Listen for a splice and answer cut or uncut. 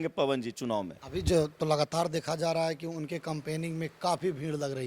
uncut